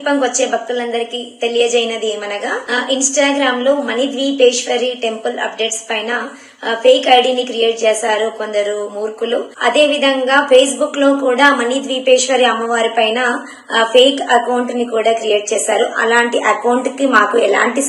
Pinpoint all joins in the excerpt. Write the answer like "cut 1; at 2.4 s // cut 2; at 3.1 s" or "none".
cut 1; at 2.6 s // cut 2; at 9.5 s